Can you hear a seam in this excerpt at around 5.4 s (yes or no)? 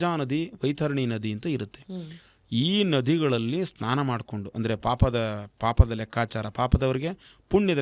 no